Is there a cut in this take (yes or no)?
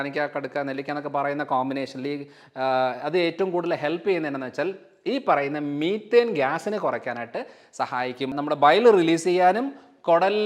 yes